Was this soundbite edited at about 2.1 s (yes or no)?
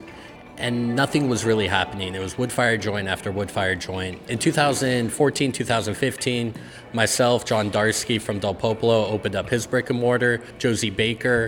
no